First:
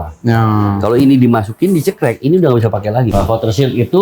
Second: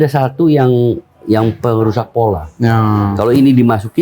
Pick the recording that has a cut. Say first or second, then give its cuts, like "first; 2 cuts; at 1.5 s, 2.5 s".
first; 1 cut; at 3.1 s